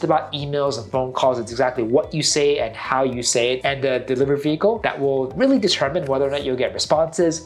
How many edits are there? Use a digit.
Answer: 0